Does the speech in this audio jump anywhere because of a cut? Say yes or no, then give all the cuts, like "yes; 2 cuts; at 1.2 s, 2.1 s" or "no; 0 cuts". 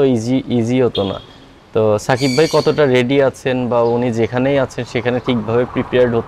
no; 0 cuts